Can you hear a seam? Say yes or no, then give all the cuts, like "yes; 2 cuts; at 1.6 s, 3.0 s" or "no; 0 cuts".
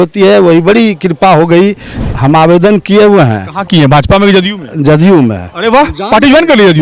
yes; 1 cut; at 1.9 s